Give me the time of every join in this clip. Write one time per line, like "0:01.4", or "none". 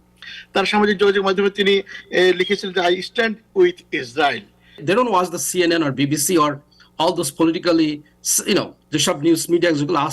0:04.8